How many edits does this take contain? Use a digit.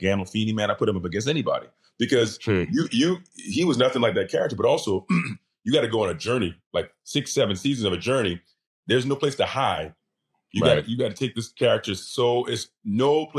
0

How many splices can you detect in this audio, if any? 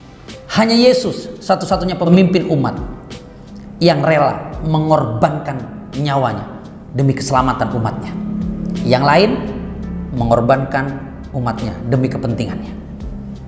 1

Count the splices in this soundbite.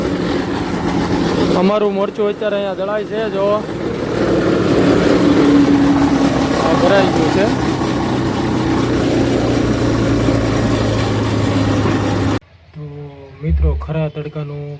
1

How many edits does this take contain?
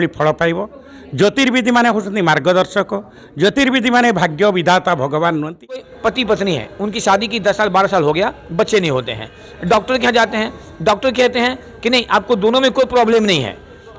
1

